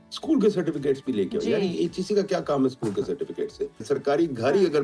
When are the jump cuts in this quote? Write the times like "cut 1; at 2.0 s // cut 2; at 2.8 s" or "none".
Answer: cut 1; at 3.8 s